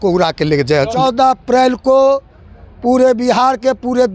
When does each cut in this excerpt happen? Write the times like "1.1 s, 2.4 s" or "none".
0.9 s